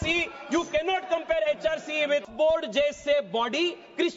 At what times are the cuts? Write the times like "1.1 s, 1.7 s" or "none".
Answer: 2.3 s